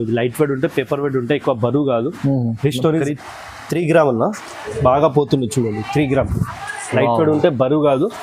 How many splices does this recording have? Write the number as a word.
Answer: one